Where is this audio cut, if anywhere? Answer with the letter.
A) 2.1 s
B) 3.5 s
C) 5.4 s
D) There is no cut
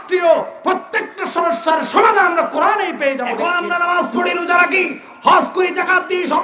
B